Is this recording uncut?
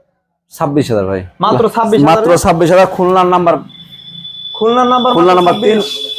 yes; 0 cuts

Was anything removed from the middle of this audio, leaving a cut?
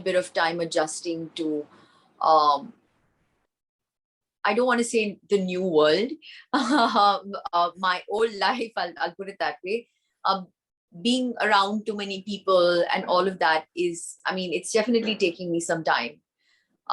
no; 0 cuts

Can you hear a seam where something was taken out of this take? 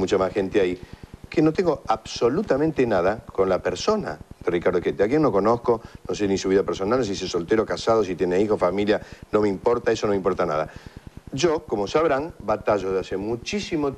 no; 0 cuts

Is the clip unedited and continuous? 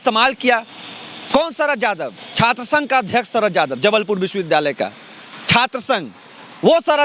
yes; 0 cuts

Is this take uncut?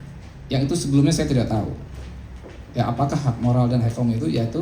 yes; 0 cuts

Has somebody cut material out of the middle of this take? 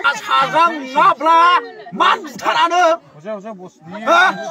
no; 0 cuts

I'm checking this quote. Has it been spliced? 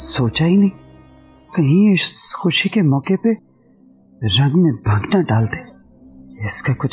no; 0 cuts

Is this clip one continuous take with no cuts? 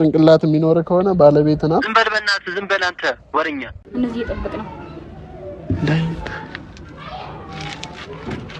no; 1 cut; at 3.9 s

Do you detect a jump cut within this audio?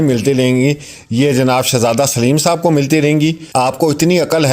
yes; 1 cut; at 3.4 s

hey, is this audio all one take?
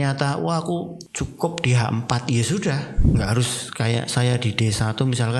no; 2 cuts; at 1.0 s, 3.0 s

